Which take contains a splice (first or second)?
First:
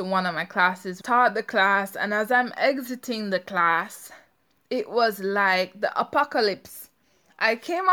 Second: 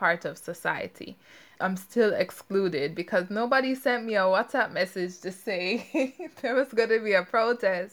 first